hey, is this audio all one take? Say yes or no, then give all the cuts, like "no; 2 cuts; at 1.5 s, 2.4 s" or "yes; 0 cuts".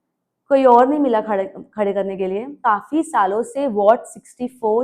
no; 1 cut; at 2.6 s